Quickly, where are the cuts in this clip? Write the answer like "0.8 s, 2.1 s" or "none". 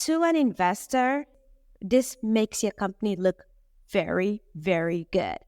1.4 s

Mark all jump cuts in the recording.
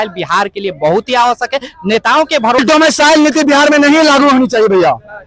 2.6 s

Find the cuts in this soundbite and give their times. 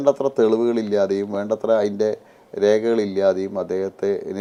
none

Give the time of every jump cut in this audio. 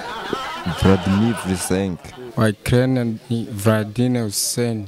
2.4 s

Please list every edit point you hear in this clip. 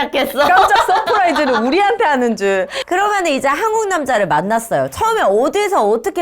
2.8 s

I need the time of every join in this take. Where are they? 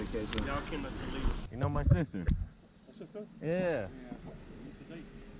1.4 s

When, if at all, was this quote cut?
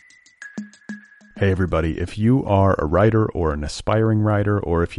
0.9 s

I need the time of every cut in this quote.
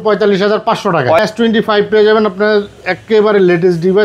1.2 s

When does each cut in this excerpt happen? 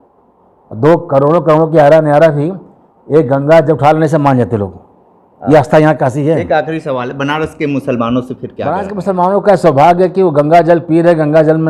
8.7 s

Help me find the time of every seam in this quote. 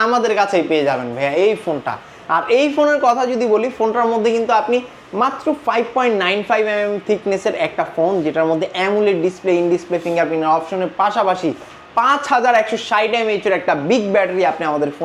none

